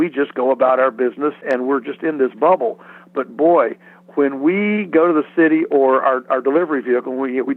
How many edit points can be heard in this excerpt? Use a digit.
1